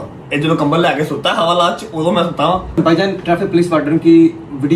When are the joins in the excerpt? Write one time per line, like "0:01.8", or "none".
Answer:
0:02.8